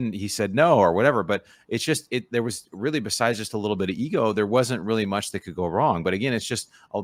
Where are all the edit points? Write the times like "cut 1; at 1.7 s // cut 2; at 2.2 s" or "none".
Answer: none